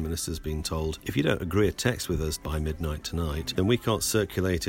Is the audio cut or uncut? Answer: cut